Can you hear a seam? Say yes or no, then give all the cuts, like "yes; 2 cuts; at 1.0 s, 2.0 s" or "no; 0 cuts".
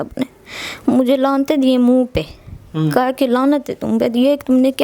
no; 0 cuts